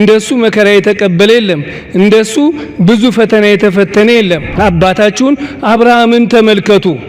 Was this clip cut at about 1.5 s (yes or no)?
no